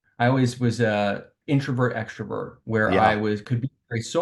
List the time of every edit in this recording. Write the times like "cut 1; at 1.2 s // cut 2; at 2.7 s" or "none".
cut 1; at 1.3 s